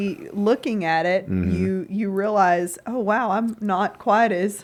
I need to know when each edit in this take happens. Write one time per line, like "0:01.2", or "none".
none